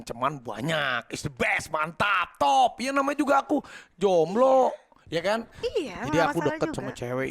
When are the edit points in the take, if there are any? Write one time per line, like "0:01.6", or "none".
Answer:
none